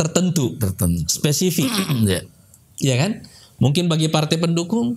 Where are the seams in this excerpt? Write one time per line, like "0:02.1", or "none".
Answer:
none